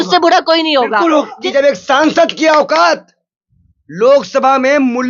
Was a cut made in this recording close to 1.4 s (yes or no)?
yes